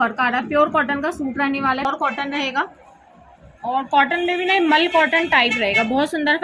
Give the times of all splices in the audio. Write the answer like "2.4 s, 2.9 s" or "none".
1.8 s